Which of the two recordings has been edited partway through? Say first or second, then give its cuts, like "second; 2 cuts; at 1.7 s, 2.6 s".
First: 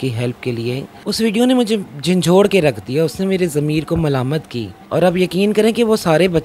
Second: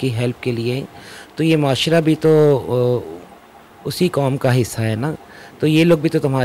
first; 2 cuts; at 1.0 s, 4.8 s